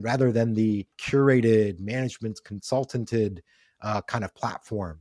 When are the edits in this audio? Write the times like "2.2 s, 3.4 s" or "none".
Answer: 0.9 s